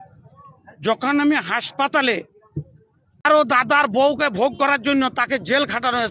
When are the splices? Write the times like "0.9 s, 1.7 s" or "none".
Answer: 3.2 s